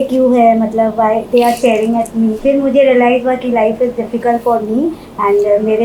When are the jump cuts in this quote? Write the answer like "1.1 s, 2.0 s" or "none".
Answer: 2.4 s